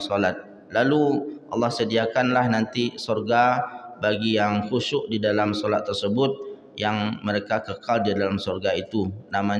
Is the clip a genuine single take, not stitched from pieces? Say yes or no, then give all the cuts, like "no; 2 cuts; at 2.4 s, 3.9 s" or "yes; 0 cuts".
yes; 0 cuts